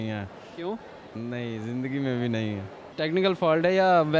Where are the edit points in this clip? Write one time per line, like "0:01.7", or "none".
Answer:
0:02.8

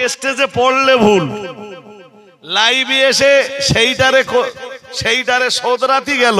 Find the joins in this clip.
none

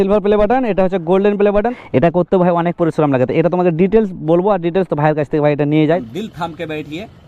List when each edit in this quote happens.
0:01.7
0:06.0

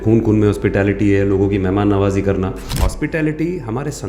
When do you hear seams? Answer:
0:02.8

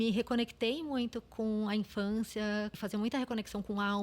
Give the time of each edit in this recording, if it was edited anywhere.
0:02.8

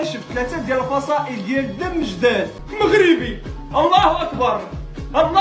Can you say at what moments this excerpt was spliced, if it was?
0:02.6

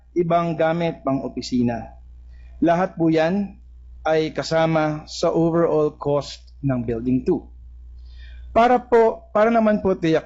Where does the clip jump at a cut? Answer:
none

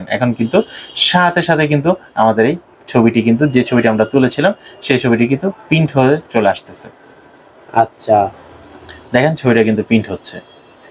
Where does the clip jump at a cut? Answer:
none

